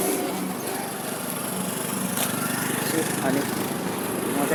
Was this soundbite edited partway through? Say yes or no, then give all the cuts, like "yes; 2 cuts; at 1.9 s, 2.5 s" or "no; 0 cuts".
no; 0 cuts